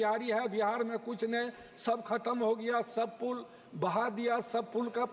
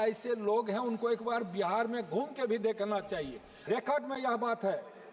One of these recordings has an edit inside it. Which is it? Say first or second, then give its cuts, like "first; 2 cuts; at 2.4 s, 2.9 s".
second; 1 cut; at 3.7 s